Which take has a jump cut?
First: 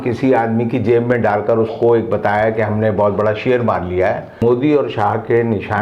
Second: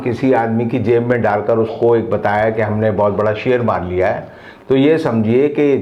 first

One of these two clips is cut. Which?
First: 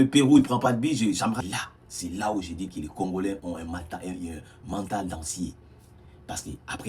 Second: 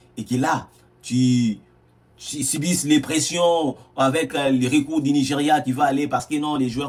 first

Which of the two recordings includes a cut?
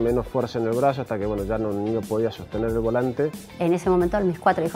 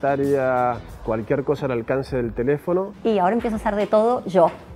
second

